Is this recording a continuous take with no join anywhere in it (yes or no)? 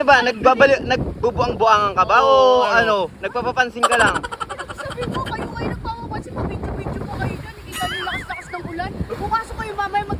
yes